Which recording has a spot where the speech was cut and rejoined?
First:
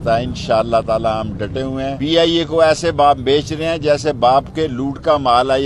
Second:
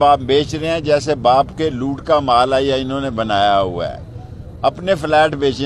first; 1 cut; at 1.9 s

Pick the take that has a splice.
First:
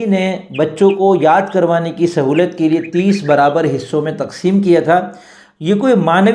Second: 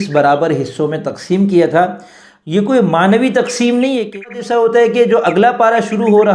second; 1 cut; at 4.1 s

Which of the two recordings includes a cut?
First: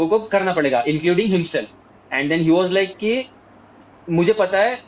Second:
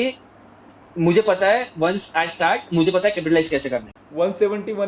second; 1 cut; at 4.0 s

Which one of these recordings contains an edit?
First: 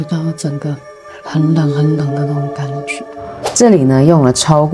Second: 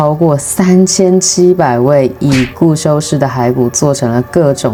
first; 1 cut; at 3.6 s

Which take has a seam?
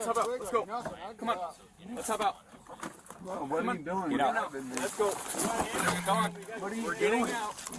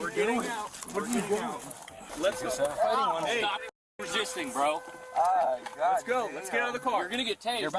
second; 1 cut; at 2.1 s

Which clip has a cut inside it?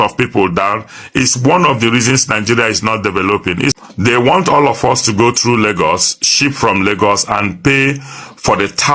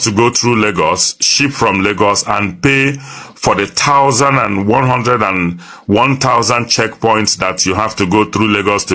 first; 1 cut; at 3.8 s

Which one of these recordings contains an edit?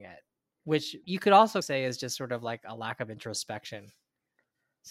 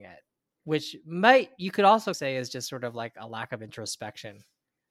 first; 1 cut; at 1.0 s

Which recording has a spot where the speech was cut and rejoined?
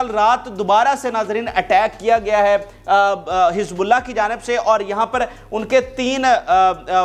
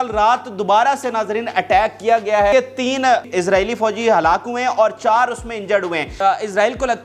second; 2 cuts; at 2.9 s, 6.1 s

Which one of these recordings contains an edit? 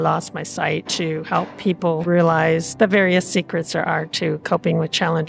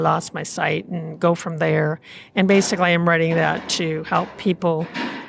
first; 2 cuts; at 0.9 s, 2.0 s

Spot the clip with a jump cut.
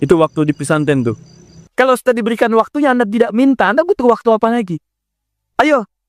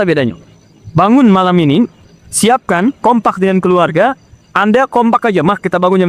first; 1 cut; at 1.6 s

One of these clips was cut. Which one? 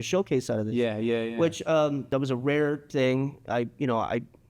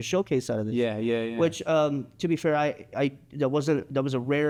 first; 1 cut; at 2.0 s

